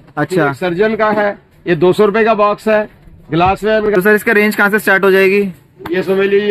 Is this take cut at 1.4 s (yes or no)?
no